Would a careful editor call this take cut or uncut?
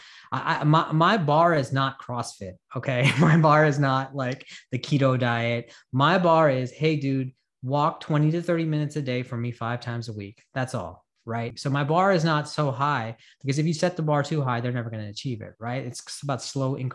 cut